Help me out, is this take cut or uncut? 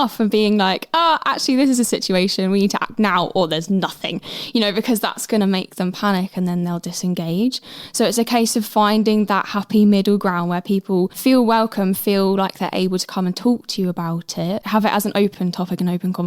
cut